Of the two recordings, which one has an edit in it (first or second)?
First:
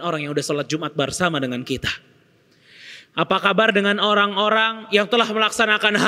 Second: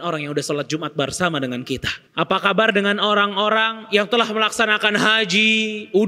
second